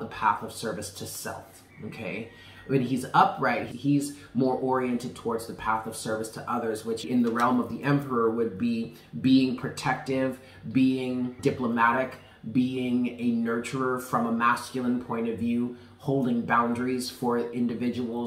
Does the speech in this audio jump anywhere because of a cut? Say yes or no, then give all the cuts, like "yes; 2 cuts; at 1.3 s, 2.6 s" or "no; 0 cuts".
yes; 3 cuts; at 3.6 s, 7.1 s, 11.4 s